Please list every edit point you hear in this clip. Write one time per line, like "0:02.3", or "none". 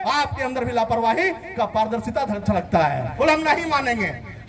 0:03.1